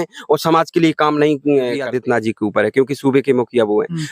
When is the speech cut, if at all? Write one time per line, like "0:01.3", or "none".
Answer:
0:01.9